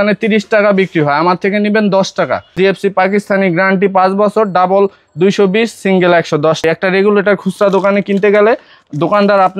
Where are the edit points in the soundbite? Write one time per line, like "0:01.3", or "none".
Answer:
0:02.5
0:06.6